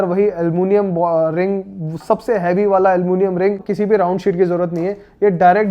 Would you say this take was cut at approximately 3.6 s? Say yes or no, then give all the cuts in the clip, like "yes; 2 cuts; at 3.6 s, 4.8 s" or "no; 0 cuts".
yes; 1 cut; at 3.6 s